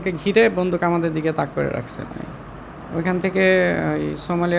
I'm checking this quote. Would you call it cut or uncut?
uncut